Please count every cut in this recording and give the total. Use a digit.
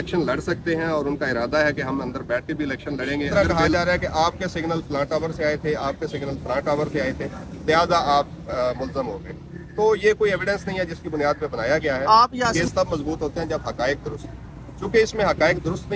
2